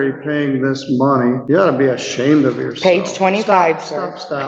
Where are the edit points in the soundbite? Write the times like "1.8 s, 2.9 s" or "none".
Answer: 1.4 s